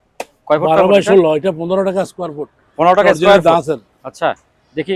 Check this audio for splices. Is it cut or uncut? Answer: uncut